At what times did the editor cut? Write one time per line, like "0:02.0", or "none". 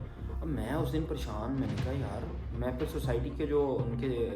none